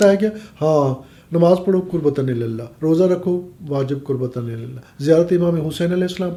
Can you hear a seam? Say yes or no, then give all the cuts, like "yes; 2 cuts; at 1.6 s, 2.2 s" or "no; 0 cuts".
no; 0 cuts